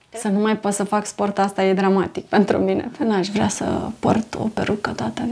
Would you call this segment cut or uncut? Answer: cut